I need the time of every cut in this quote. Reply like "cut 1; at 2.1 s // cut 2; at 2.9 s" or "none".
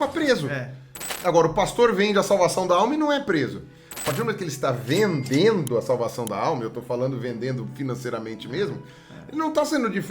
cut 1; at 4.0 s